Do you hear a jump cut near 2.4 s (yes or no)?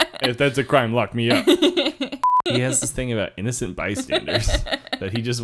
yes